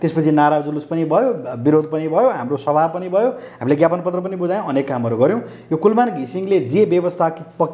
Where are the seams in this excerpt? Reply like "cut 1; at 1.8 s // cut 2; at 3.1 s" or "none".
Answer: none